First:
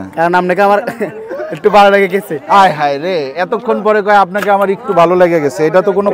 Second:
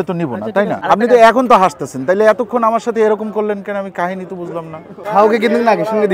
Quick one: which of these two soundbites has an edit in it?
second; 2 cuts; at 0.8 s, 5.0 s

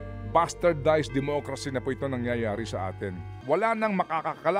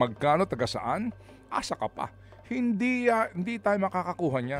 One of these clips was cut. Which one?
first; 1 cut; at 3.3 s

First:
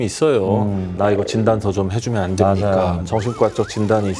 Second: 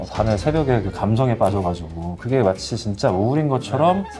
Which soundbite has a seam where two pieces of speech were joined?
first; 2 cuts; at 0.9 s, 3.0 s

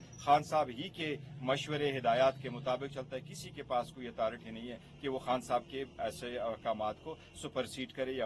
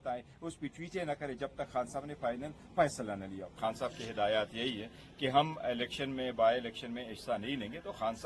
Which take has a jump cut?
second; 1 cut; at 3.5 s

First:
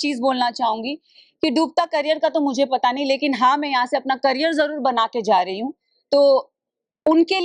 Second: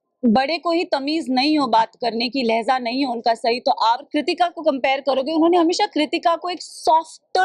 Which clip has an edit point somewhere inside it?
second; 1 cut; at 4.1 s

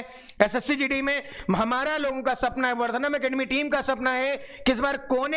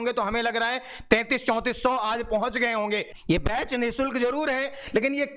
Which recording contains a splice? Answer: second; 1 cut; at 3.1 s

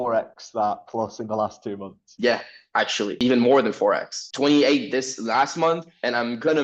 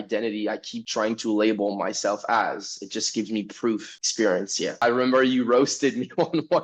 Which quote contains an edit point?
second; 1 cut; at 4.8 s

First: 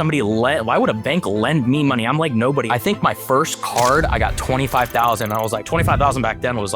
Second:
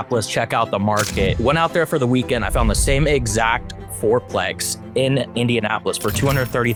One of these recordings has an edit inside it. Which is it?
first; 2 cuts; at 2.7 s, 5.6 s

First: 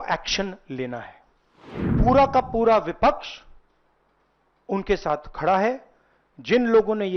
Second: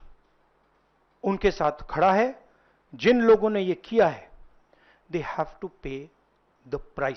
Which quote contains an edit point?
first; 1 cut; at 1.9 s

